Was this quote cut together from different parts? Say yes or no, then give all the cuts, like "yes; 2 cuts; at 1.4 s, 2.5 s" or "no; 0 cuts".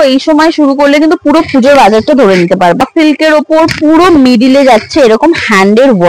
yes; 1 cut; at 2.9 s